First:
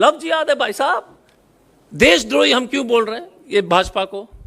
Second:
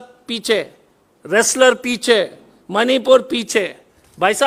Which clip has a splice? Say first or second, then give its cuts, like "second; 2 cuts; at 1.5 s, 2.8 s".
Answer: first; 1 cut; at 1.5 s